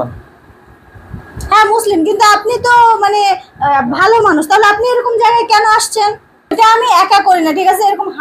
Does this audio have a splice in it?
yes; 1 cut; at 6.5 s

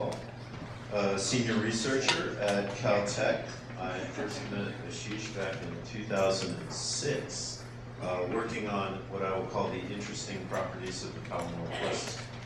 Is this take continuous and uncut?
yes; 0 cuts

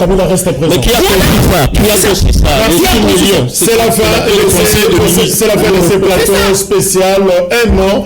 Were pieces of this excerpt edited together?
no; 0 cuts

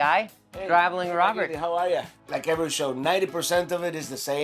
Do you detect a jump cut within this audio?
yes; 1 cut; at 2.1 s

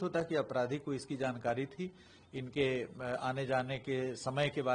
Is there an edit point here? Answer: no; 0 cuts

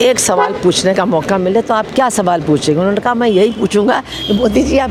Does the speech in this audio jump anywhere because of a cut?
no; 0 cuts

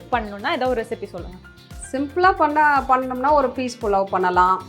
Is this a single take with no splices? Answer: yes; 0 cuts

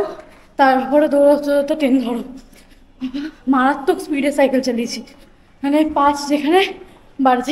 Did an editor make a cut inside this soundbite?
no; 0 cuts

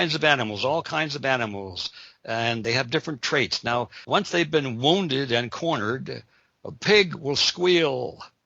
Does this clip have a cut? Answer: yes; 2 cuts; at 2.6 s, 4.0 s

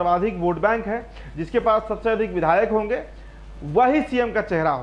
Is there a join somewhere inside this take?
no; 0 cuts

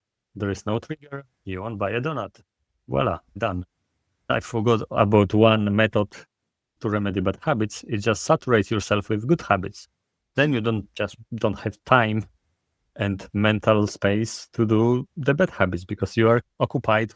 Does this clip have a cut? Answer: yes; 1 cut; at 4.3 s

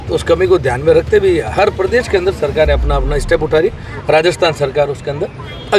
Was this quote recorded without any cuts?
yes; 0 cuts

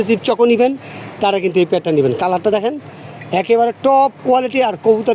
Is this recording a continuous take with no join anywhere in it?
yes; 0 cuts

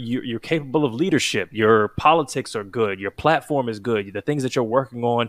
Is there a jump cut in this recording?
no; 0 cuts

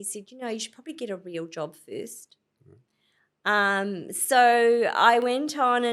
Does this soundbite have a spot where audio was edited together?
no; 0 cuts

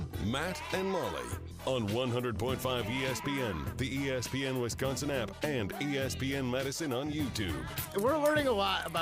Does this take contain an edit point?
yes; 1 cut; at 7.8 s

